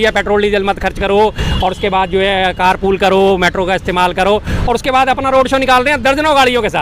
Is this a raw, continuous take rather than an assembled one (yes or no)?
yes